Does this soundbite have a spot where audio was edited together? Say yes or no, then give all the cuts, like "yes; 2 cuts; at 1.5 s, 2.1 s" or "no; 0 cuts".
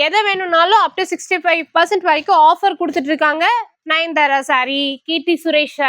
yes; 1 cut; at 3.8 s